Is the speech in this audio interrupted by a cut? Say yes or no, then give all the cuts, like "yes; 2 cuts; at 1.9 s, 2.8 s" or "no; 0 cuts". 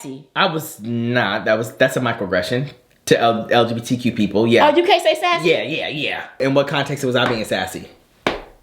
yes; 1 cut; at 6.4 s